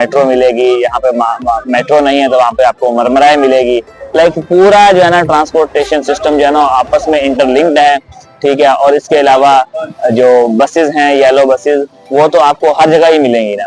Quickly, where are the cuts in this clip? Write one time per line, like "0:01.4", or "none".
none